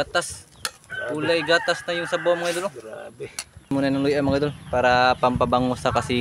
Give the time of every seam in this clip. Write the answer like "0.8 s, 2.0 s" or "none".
3.7 s